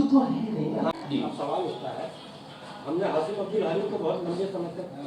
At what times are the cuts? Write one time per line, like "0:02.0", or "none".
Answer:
0:00.9